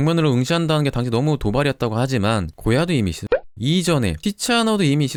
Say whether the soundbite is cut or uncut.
uncut